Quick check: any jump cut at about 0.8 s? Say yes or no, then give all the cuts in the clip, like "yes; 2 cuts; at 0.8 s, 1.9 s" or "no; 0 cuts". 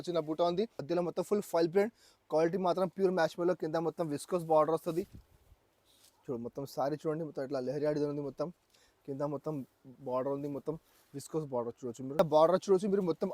yes; 2 cuts; at 0.8 s, 12.2 s